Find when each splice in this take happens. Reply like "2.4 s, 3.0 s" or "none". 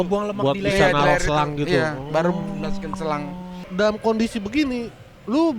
3.6 s